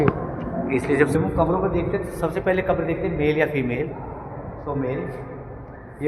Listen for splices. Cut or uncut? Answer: cut